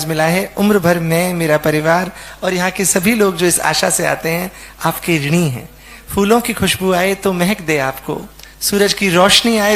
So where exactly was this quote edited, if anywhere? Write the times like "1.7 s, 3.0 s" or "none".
none